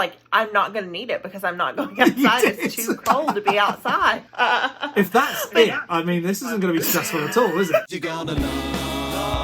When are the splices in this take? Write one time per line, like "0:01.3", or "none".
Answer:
0:04.2
0:07.9